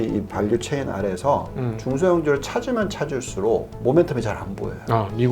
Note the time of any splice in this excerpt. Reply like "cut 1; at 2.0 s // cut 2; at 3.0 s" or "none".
cut 1; at 3.7 s